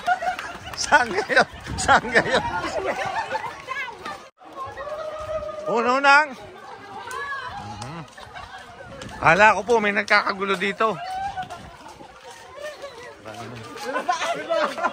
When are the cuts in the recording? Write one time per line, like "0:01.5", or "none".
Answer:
0:04.4